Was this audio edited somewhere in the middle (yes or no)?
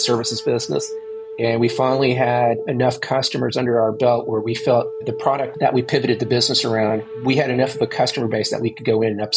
yes